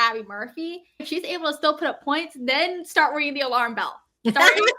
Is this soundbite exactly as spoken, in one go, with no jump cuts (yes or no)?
no